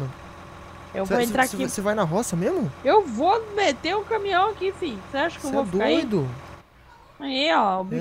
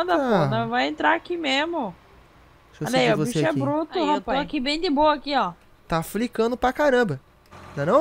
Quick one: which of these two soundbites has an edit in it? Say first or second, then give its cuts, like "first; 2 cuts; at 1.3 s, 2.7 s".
second; 1 cut; at 4.3 s